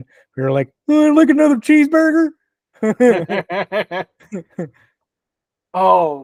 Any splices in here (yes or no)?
no